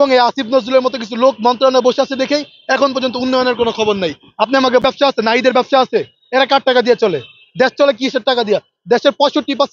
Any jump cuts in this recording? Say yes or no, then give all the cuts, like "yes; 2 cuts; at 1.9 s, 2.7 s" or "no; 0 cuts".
yes; 1 cut; at 4.8 s